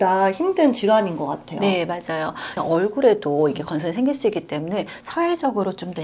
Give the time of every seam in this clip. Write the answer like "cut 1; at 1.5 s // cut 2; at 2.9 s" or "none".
cut 1; at 2.6 s